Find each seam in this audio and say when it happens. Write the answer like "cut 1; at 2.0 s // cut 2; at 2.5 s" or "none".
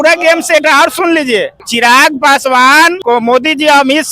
cut 1; at 1.6 s // cut 2; at 3.0 s